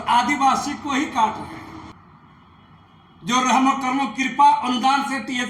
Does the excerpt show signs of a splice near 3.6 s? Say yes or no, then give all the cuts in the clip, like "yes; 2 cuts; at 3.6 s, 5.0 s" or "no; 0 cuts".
no; 1 cut; at 1.9 s